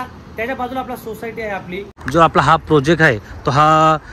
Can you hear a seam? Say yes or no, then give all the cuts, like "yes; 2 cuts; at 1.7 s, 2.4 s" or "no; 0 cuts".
yes; 1 cut; at 2.0 s